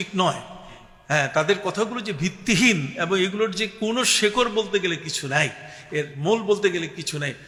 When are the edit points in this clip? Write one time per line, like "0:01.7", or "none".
none